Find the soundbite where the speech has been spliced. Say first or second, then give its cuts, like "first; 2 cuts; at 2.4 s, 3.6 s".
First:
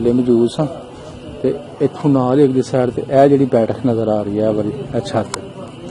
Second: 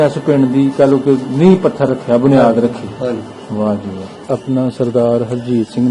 second; 1 cut; at 4.2 s